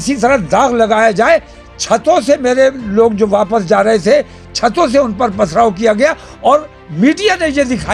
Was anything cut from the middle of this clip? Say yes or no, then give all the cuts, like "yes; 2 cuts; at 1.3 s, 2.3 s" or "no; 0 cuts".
no; 0 cuts